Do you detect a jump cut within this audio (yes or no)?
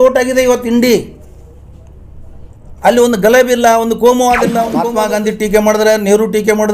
yes